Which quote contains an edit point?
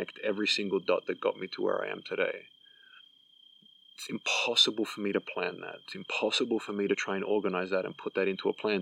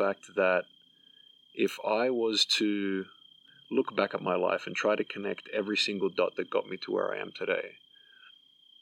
second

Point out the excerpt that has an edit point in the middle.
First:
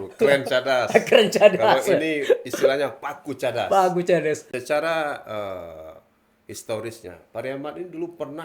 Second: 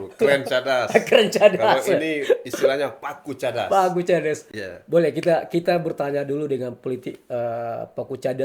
first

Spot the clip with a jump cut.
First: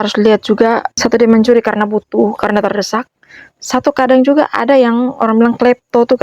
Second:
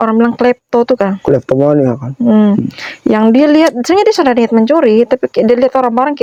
first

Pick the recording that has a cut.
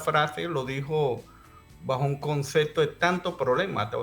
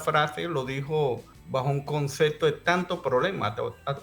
second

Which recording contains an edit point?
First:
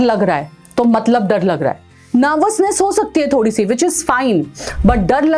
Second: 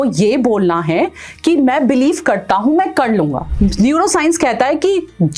second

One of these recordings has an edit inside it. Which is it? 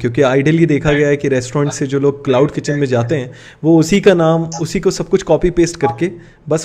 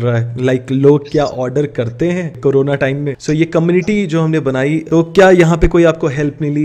second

